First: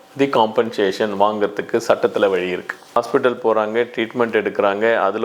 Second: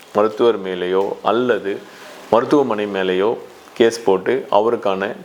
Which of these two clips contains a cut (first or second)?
first